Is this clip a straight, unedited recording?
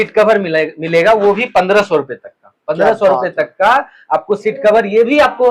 yes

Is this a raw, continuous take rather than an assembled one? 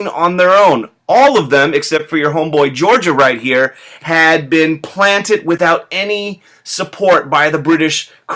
yes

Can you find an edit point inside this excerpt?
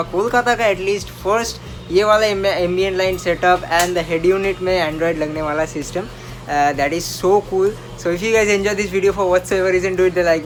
no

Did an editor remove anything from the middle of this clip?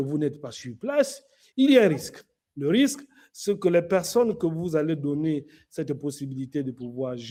no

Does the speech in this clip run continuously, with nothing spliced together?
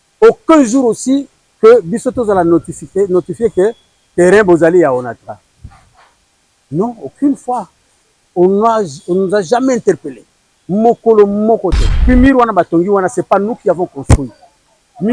no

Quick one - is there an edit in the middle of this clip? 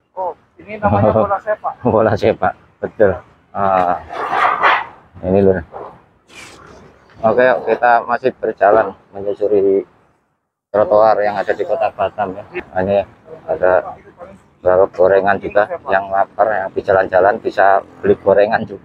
yes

